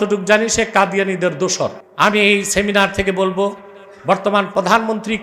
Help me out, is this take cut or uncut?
cut